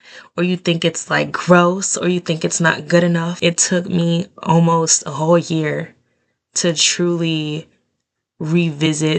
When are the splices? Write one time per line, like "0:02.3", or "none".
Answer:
0:03.4